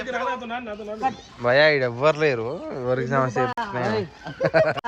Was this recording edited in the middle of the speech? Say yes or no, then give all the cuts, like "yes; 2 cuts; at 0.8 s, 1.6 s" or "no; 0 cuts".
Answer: no; 0 cuts